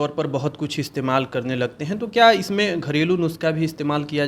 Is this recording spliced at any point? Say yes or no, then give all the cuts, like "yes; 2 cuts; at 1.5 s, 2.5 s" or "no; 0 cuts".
no; 0 cuts